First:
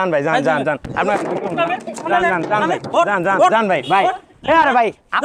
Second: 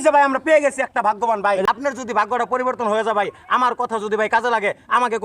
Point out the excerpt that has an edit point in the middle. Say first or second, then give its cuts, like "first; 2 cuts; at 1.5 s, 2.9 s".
second; 1 cut; at 1.7 s